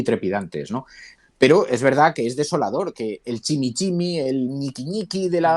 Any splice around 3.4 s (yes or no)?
no